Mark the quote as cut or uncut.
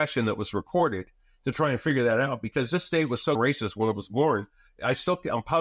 cut